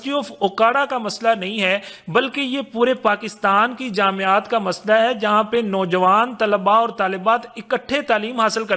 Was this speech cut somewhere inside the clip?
no; 0 cuts

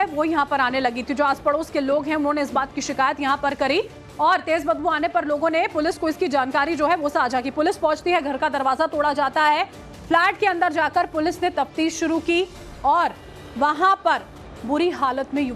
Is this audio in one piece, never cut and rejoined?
yes; 0 cuts

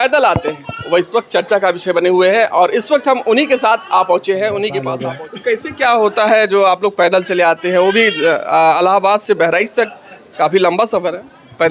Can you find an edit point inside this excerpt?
yes; 1 cut; at 4.9 s

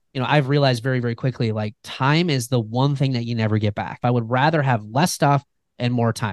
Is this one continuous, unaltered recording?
no; 1 cut; at 4.0 s

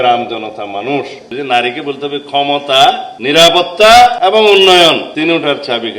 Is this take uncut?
no; 4 cuts; at 1.2 s, 3.1 s, 4.2 s, 5.1 s

